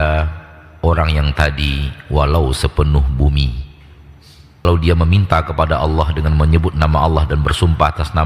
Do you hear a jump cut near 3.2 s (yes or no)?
no